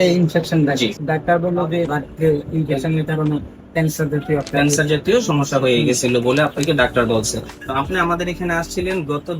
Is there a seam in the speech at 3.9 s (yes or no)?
no